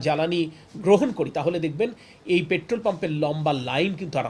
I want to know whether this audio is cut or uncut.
uncut